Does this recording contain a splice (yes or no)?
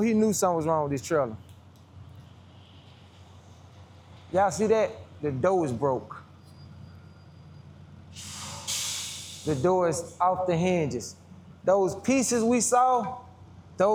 no